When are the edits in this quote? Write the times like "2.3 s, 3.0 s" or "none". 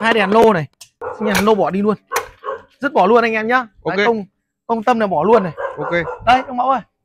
1.0 s